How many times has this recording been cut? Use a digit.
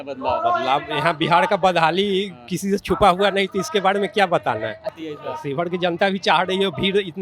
1